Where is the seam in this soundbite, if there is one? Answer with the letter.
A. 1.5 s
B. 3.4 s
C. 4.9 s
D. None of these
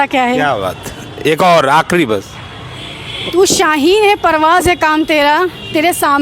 B